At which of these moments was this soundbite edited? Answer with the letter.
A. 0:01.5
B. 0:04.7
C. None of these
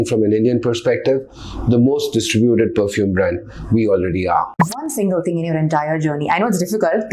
B